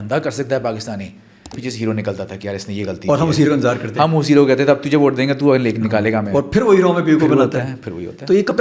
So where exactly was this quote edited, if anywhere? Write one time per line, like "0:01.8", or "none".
0:01.6